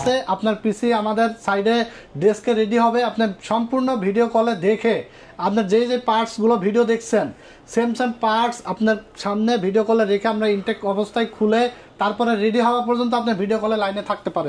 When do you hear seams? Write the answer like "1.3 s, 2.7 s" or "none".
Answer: none